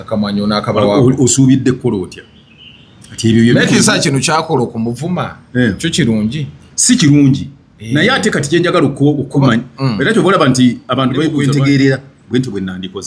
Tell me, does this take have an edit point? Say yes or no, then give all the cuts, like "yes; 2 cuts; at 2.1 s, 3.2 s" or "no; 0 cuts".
yes; 1 cut; at 11.3 s